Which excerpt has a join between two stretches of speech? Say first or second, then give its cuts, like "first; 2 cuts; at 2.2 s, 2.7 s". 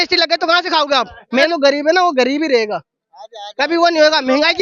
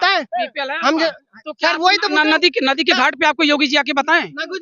first; 1 cut; at 1.5 s